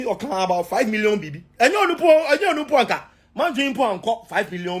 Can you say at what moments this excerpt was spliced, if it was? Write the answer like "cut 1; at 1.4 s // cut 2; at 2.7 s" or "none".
none